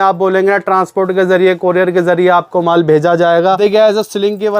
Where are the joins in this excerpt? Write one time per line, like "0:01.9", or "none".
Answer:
0:03.6

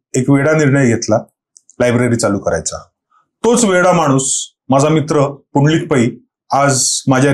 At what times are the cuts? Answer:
none

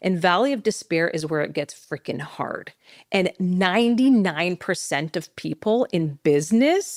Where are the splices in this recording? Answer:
none

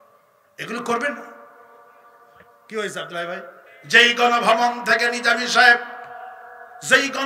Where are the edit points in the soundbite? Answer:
0:03.6

